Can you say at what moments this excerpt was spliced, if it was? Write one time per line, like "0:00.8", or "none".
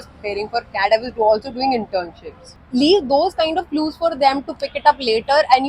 0:02.6